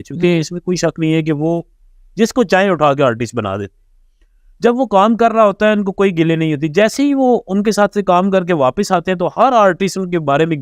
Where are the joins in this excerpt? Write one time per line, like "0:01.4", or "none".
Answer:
none